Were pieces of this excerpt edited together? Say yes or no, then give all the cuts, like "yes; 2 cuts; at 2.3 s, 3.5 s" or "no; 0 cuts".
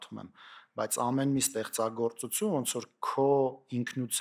no; 0 cuts